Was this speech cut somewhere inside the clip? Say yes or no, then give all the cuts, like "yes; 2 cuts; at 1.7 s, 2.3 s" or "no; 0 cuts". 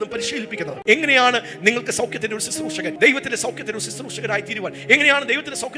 no; 0 cuts